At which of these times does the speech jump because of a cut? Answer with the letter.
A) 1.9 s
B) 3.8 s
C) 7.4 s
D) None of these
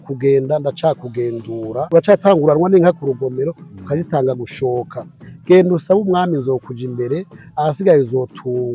A